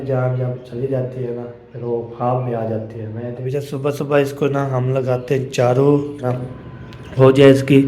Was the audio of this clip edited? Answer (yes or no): yes